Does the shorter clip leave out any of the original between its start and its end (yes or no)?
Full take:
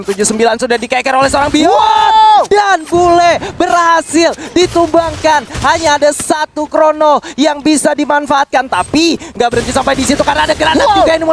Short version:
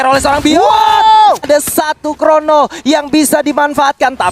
yes